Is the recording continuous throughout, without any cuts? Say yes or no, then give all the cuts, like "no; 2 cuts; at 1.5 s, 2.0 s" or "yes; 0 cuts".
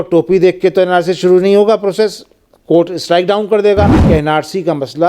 no; 1 cut; at 4.0 s